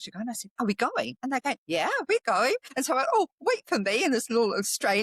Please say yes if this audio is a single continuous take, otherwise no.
no